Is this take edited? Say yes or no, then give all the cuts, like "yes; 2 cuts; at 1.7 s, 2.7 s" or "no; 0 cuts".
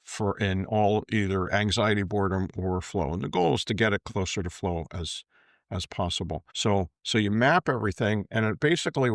yes; 1 cut; at 6.5 s